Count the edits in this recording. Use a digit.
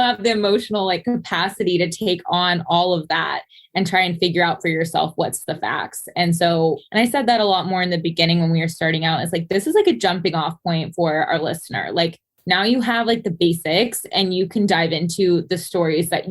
1